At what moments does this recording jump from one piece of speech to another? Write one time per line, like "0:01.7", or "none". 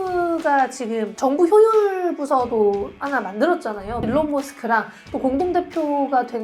0:01.1
0:04.0